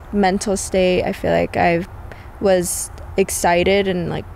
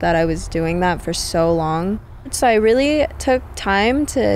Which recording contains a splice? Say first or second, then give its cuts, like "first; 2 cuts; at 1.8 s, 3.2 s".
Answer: second; 1 cut; at 2.3 s